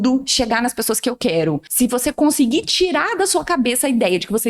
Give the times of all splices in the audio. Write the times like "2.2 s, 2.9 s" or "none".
1.7 s

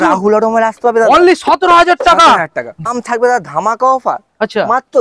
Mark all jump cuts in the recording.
2.9 s

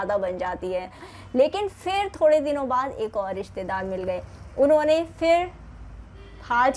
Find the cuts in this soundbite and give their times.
1.0 s

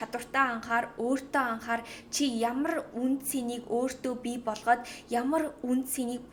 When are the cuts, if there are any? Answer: none

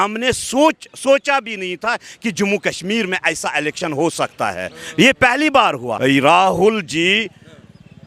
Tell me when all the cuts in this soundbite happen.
5.9 s

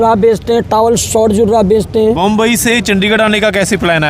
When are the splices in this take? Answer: 2.2 s

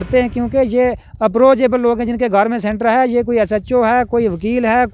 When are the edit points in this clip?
none

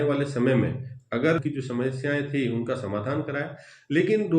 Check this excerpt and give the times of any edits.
1.4 s

